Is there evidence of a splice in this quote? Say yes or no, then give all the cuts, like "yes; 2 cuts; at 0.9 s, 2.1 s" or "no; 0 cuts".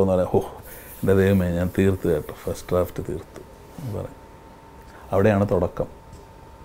no; 0 cuts